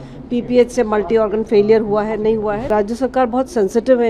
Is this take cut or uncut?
cut